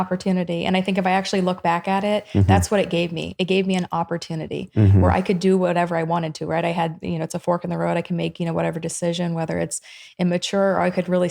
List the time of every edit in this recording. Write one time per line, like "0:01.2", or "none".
none